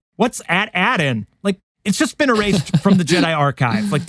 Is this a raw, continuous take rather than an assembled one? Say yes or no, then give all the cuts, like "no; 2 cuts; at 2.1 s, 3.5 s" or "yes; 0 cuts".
yes; 0 cuts